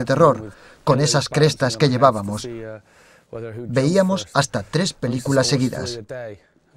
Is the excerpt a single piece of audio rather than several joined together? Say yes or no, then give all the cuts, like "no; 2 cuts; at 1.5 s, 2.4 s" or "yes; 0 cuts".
no; 1 cut; at 5.8 s